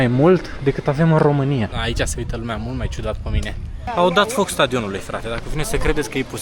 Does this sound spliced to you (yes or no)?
yes